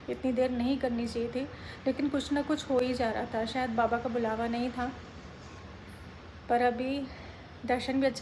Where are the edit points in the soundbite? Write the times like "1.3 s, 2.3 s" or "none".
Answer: none